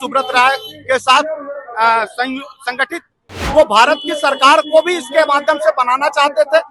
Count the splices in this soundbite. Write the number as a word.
one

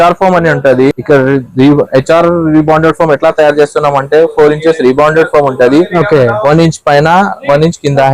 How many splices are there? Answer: one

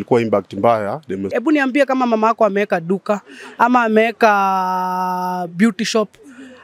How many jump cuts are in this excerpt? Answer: one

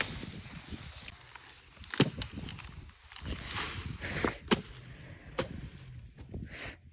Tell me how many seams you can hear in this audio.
one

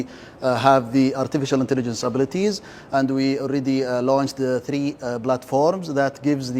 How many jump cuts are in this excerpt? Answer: zero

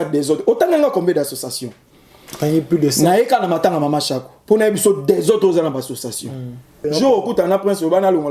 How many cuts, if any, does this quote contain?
one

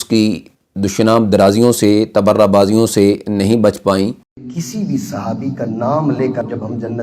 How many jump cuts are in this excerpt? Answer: one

